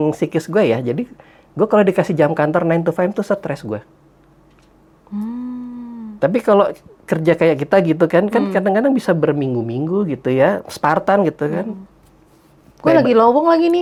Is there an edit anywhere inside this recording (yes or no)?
no